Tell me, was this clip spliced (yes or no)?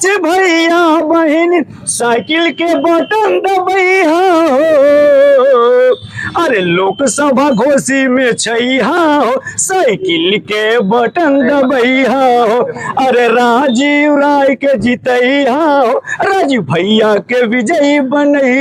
no